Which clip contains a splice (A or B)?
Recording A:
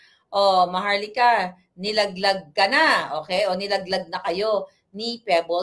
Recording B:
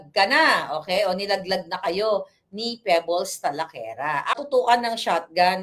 B